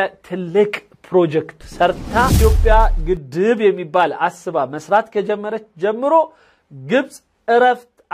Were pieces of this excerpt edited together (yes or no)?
yes